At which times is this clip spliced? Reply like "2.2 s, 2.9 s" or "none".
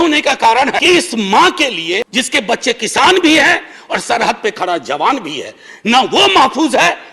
0.8 s, 2.1 s